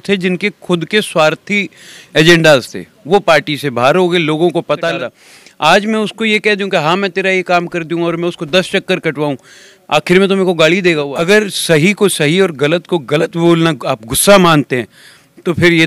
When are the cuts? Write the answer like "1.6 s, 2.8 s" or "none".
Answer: 4.9 s, 11.1 s